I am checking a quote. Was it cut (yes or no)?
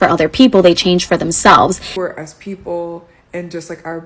yes